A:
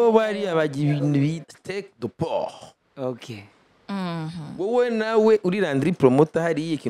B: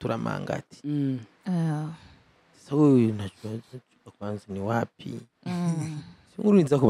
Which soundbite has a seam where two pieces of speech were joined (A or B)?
A